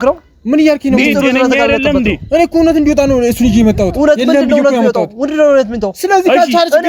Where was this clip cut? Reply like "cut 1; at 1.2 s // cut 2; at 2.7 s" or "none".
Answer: none